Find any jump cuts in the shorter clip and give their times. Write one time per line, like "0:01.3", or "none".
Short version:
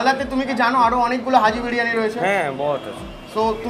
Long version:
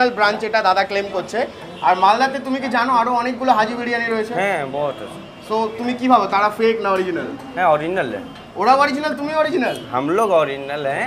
none